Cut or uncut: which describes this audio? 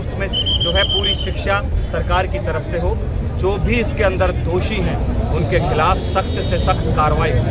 uncut